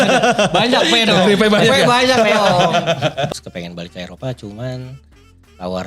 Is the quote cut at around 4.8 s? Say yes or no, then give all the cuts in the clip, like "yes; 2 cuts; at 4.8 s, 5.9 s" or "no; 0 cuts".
no; 1 cut; at 3.3 s